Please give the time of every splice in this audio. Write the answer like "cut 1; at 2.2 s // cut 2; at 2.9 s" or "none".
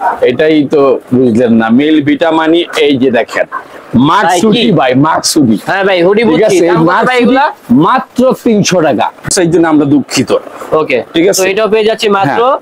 cut 1; at 9.3 s